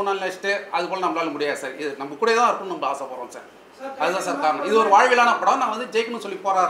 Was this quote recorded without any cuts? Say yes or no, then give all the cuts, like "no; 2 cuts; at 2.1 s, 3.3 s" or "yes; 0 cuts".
yes; 0 cuts